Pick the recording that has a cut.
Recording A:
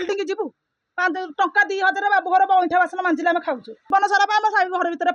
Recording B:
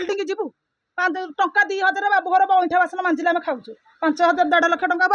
A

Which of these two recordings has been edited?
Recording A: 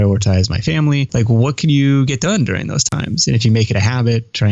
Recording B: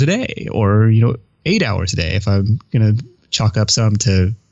A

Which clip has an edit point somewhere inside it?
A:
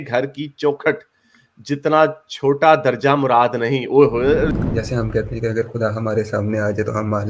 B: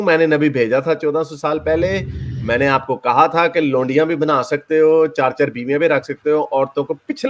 A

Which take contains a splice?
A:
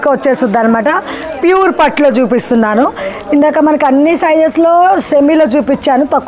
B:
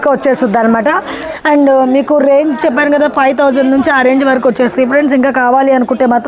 B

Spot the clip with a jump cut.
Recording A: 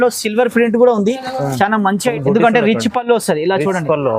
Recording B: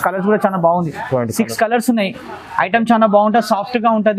A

